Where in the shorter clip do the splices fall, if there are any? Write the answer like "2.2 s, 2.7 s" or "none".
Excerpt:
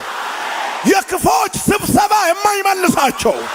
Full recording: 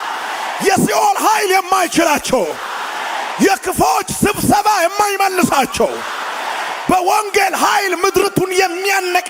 none